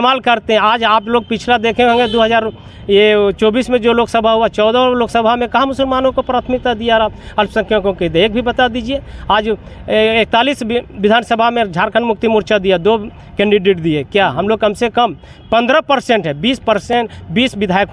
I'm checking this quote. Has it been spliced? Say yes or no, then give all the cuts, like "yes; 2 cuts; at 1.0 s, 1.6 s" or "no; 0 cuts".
no; 0 cuts